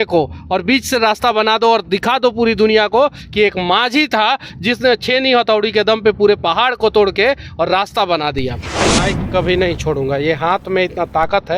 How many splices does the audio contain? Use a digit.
1